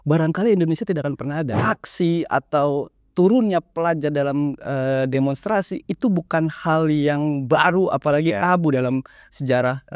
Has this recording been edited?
yes; 1 cut; at 1.5 s

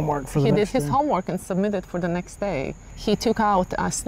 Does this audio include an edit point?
no; 0 cuts

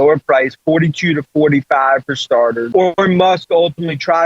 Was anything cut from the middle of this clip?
yes; 1 cut; at 2.6 s

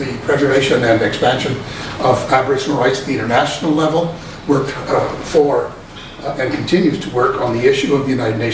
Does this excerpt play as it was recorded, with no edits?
yes; 0 cuts

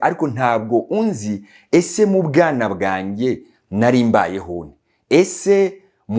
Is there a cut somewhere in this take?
no; 0 cuts

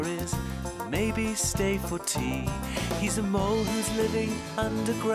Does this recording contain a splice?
no; 0 cuts

